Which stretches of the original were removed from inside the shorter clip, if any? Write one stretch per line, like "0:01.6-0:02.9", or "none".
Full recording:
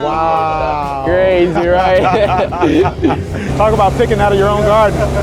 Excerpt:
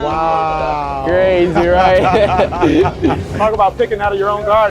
0:03.3-0:03.5